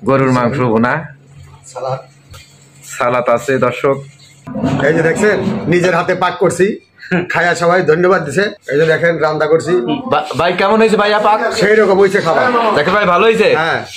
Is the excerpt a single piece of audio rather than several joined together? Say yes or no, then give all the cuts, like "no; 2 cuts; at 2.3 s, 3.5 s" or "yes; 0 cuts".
no; 1 cut; at 4.5 s